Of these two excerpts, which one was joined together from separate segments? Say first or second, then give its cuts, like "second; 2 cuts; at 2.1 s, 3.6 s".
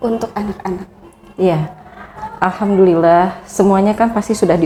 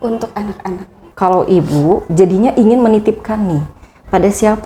second; 1 cut; at 1.0 s